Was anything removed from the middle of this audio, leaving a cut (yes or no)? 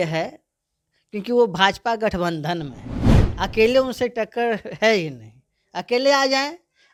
no